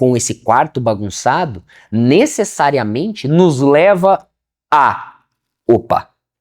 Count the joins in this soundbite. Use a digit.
0